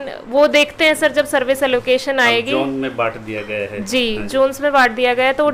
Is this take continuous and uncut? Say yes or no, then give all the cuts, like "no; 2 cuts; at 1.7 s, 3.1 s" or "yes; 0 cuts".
yes; 0 cuts